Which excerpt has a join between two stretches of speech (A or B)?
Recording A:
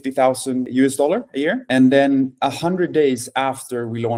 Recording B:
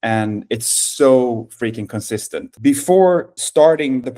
B